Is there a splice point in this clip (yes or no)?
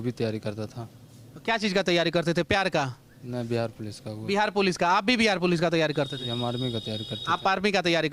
no